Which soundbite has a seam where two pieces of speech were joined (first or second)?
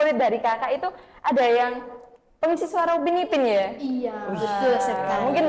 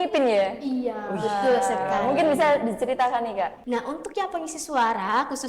second